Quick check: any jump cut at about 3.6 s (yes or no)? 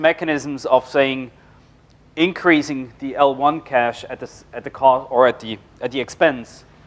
yes